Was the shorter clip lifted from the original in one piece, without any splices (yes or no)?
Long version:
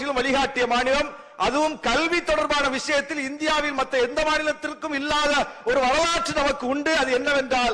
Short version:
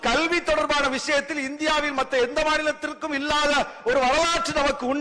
yes